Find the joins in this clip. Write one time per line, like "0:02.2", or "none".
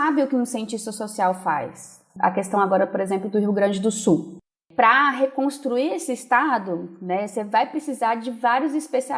0:02.1